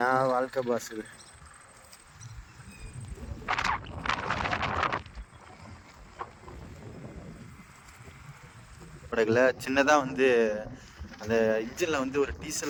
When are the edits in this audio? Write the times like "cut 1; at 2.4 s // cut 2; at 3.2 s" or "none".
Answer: none